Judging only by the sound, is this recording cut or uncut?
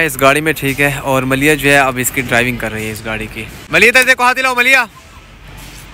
uncut